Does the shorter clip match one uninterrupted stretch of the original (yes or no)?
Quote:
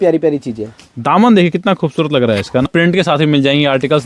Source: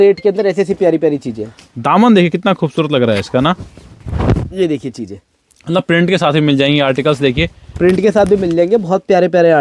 no